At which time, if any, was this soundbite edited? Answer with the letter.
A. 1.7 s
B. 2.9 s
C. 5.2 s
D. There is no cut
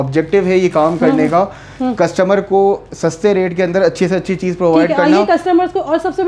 D